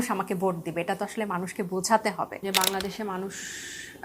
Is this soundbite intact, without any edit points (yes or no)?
no